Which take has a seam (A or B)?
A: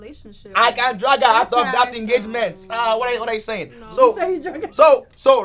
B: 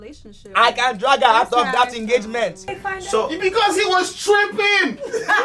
B